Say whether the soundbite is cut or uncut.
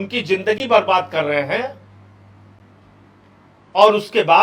uncut